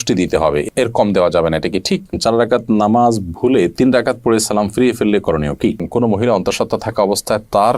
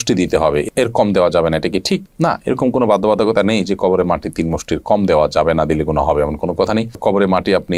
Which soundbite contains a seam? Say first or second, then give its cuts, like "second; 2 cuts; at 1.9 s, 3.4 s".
first; 2 cuts; at 2.1 s, 5.8 s